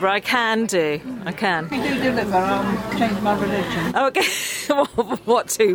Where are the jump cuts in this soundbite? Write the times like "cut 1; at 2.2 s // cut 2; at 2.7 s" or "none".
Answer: none